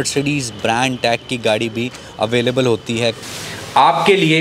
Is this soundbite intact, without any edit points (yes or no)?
no